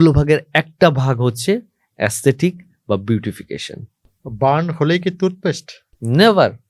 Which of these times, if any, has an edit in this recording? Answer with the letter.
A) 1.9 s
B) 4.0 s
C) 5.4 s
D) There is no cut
B